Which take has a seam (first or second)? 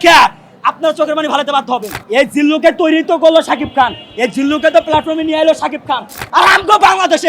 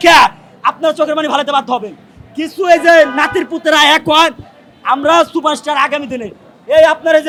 first